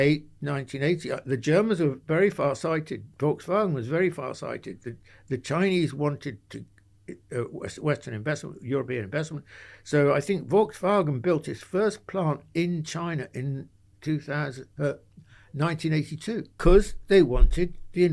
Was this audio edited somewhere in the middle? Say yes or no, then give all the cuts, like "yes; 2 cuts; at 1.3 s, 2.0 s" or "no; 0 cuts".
yes; 1 cut; at 16.6 s